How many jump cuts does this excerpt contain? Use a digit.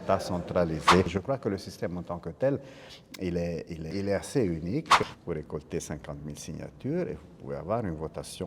3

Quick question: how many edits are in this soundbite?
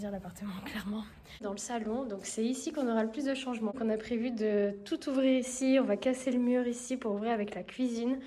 2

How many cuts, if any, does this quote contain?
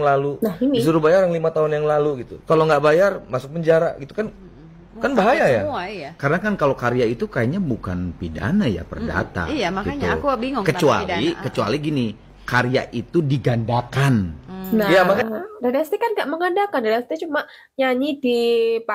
0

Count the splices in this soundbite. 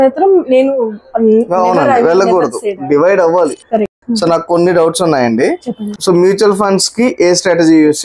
2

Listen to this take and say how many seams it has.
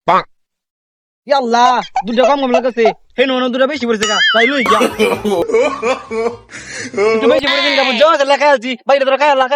2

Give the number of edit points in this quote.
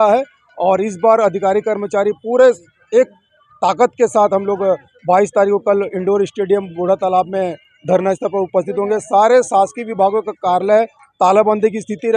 0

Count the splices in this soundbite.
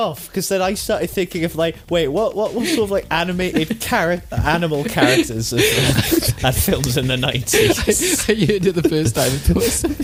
0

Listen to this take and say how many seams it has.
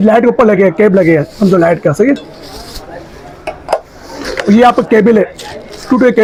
0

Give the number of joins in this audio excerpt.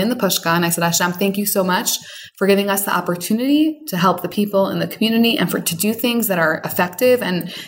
0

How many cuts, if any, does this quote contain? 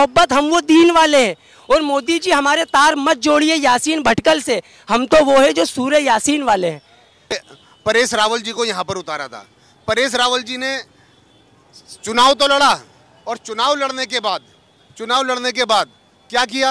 1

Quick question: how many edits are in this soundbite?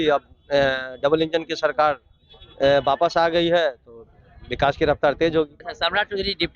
1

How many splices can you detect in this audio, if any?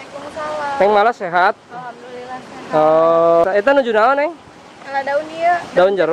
1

